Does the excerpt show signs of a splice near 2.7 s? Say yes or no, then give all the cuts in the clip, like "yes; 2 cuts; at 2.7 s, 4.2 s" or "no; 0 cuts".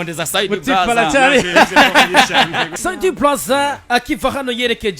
yes; 1 cut; at 2.7 s